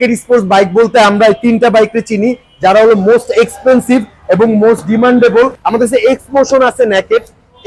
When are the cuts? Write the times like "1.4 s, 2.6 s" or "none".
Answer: 5.6 s